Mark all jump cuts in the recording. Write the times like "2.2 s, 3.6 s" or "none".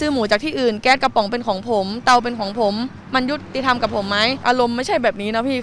4.4 s